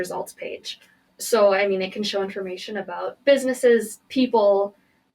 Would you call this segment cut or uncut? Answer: cut